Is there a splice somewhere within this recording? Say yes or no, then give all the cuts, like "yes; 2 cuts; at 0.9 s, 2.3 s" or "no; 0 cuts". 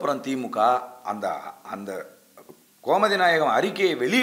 no; 0 cuts